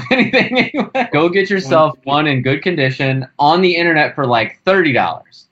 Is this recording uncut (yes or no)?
no